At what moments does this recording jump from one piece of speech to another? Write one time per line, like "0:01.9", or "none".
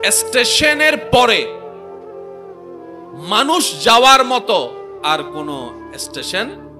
none